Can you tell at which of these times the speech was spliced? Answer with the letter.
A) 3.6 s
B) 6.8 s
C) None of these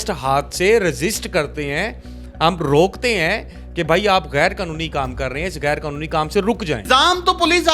B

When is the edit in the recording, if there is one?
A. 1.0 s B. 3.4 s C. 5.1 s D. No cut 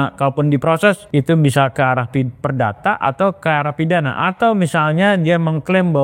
A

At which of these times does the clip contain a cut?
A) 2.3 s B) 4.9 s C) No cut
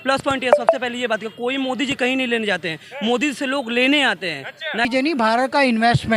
B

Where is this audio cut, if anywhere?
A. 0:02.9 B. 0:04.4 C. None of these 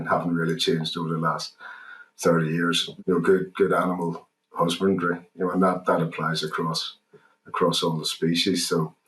A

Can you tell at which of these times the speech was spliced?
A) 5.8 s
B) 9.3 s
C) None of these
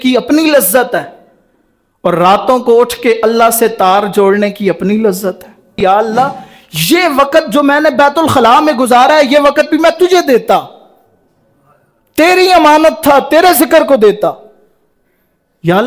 A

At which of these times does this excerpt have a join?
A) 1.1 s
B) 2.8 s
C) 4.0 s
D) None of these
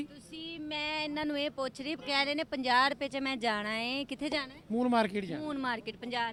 D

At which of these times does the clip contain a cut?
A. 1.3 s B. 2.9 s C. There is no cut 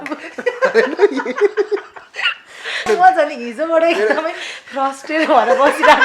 B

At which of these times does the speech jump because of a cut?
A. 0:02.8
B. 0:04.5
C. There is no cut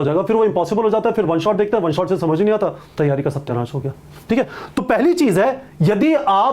A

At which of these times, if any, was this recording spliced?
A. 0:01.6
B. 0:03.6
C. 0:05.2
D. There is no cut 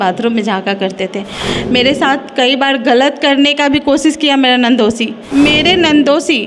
C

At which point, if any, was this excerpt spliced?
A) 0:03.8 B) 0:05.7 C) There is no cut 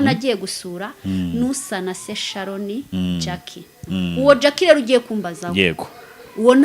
A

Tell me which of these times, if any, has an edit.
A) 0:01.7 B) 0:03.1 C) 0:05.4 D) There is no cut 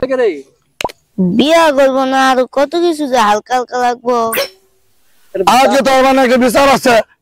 C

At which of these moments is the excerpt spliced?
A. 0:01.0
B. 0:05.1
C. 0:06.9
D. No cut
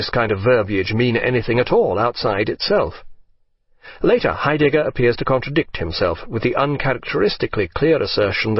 C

